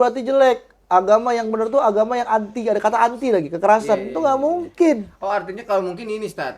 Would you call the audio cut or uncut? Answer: uncut